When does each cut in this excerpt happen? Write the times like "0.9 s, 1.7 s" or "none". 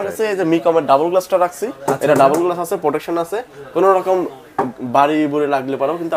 none

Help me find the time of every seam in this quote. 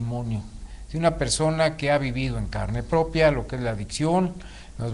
3.9 s

